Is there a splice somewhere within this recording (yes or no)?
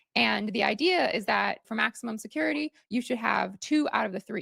yes